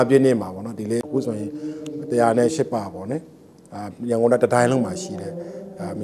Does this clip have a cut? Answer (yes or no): yes